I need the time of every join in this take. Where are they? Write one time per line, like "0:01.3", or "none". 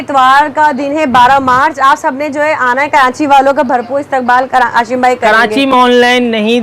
none